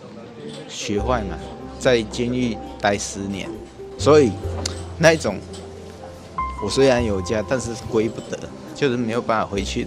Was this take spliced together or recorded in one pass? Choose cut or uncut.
uncut